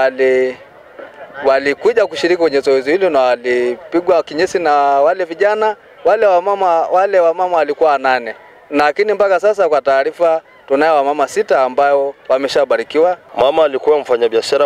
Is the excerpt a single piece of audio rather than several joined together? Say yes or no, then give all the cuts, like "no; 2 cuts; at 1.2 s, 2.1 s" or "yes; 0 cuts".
no; 1 cut; at 13.2 s